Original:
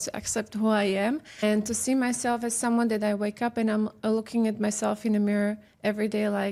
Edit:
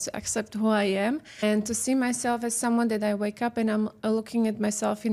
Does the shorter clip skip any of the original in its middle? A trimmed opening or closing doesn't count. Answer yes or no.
no